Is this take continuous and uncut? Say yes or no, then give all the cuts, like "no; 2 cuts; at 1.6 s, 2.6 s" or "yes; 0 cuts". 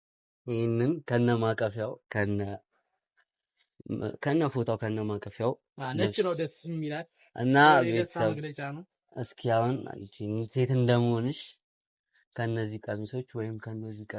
yes; 0 cuts